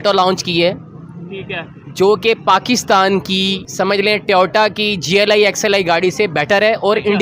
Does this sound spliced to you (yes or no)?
yes